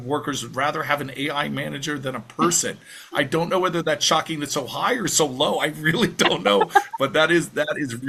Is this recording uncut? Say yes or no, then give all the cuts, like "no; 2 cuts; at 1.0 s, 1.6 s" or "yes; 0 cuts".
yes; 0 cuts